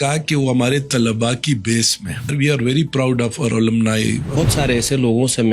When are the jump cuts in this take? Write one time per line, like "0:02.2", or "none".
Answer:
0:02.3
0:04.4